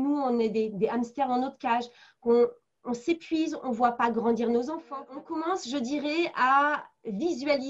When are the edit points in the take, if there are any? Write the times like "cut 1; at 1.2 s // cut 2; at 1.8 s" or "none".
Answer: cut 1; at 5.1 s